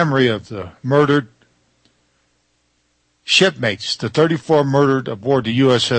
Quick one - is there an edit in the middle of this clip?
no; 0 cuts

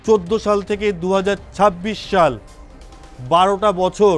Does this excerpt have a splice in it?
no; 0 cuts

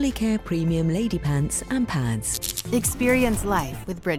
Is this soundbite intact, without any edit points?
yes; 0 cuts

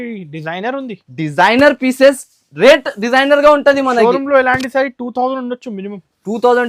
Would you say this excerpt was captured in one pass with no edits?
yes; 0 cuts

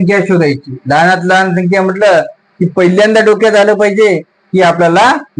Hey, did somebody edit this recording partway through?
no; 0 cuts

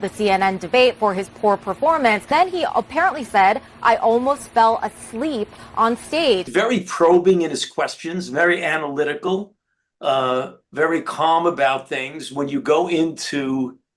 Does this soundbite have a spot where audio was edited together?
yes; 2 cuts; at 2.3 s, 6.5 s

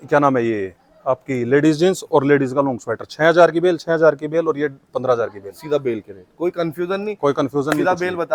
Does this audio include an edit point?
no; 0 cuts

